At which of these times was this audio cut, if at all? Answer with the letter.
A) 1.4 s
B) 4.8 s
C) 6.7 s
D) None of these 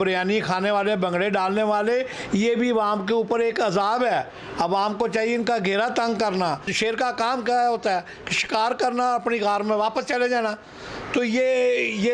C